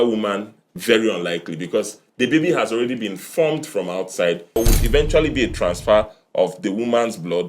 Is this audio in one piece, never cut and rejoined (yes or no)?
no